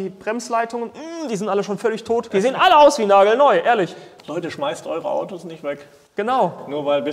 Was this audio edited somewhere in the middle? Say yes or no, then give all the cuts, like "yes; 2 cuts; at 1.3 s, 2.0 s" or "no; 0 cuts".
yes; 2 cuts; at 2.3 s, 4.1 s